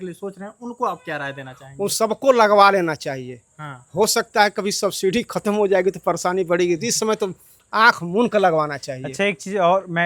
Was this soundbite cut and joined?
no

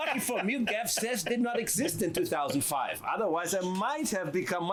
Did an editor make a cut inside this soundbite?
no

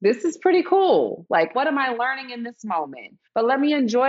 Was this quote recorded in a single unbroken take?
no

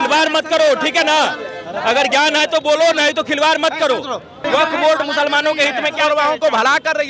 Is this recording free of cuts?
no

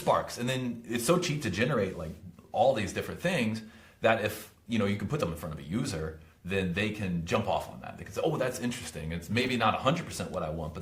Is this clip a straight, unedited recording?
yes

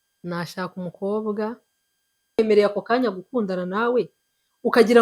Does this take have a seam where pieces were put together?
yes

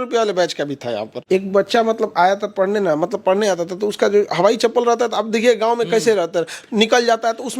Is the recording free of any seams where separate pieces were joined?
no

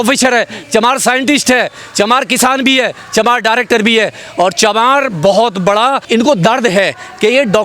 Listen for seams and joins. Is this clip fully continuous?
no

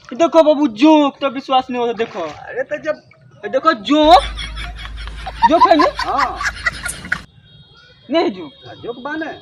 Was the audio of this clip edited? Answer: no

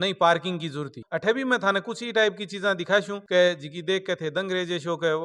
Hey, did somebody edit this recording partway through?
yes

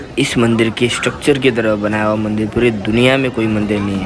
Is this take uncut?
yes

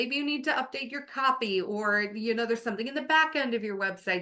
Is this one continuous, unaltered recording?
yes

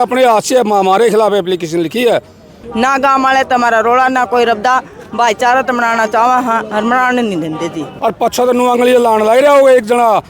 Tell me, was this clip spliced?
yes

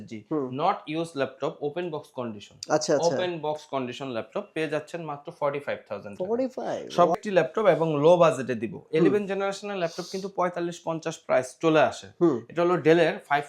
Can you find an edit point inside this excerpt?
yes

